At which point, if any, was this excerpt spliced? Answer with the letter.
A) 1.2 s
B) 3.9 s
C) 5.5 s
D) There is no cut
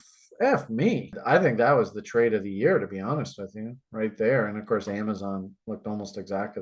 A